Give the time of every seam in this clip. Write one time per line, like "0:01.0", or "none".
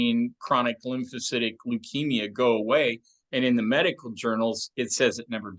none